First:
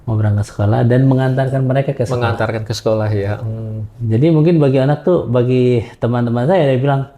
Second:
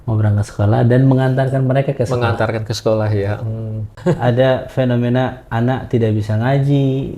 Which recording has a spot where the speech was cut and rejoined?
second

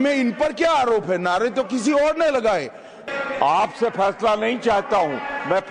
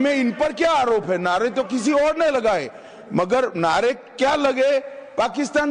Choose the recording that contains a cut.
first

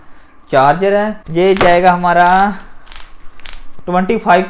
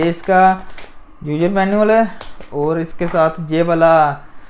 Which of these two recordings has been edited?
first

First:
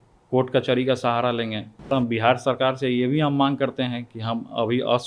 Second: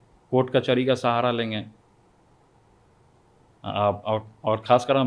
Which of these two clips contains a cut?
first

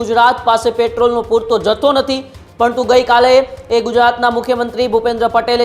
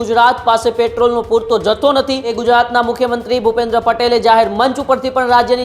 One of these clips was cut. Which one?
second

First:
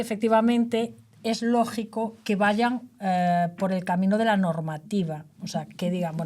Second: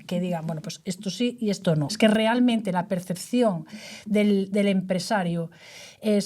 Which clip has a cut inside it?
second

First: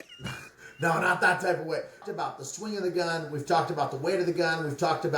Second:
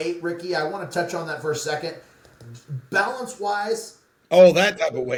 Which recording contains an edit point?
first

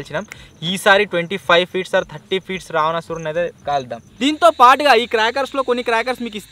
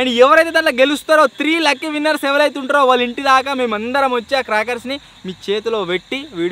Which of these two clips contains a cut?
first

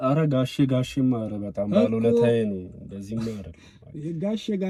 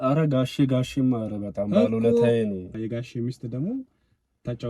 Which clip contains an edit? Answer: second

